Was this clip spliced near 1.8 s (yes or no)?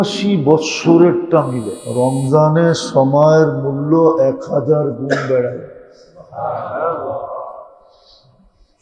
yes